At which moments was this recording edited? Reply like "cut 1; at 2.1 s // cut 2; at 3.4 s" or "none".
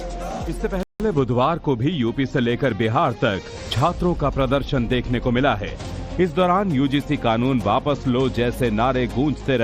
none